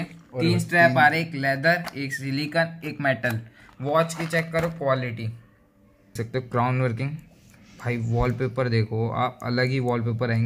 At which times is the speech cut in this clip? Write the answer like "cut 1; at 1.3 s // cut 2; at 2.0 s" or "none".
cut 1; at 6.1 s